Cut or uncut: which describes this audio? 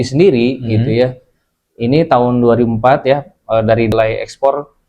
cut